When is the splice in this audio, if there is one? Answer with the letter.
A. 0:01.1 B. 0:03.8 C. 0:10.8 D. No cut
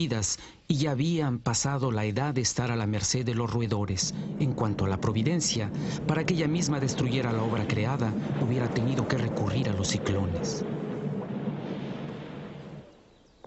C